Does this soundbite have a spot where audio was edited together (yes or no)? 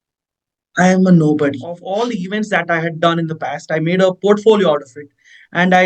yes